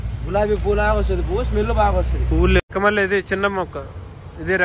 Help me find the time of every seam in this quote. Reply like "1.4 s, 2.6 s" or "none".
2.6 s